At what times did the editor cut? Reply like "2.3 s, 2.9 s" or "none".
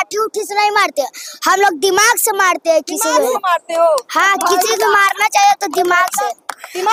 none